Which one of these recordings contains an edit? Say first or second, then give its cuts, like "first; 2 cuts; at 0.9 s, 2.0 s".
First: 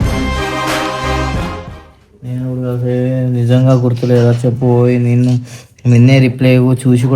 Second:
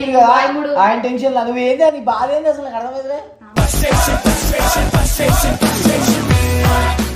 first; 1 cut; at 1.7 s